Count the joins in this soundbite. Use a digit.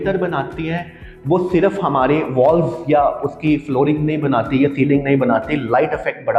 0